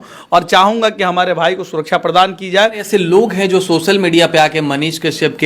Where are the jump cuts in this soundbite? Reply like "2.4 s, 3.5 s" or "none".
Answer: 2.9 s